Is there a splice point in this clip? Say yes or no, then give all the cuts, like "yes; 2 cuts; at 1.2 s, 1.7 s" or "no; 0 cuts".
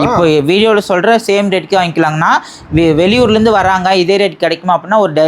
no; 0 cuts